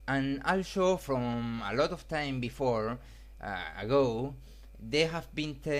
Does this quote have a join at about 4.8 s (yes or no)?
yes